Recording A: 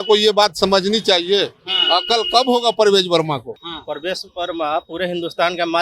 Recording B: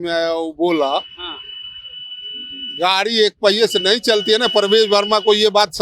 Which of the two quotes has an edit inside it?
A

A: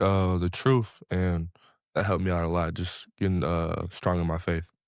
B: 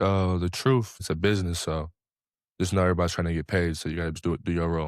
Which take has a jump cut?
B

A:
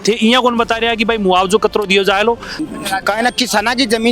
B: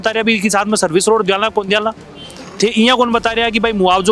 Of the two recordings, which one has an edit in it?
A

